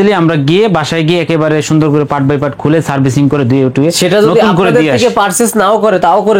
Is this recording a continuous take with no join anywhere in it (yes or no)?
yes